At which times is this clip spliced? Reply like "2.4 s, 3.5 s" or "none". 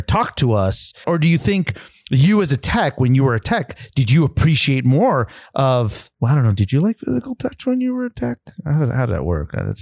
1.0 s, 6.1 s